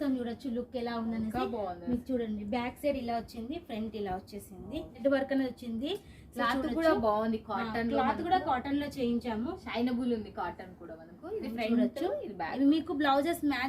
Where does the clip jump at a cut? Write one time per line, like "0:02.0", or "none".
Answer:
0:05.0